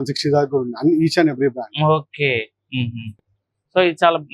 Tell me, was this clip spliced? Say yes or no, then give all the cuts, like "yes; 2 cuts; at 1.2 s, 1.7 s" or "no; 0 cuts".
no; 0 cuts